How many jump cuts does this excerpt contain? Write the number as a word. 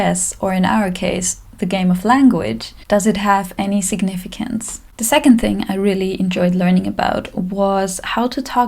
zero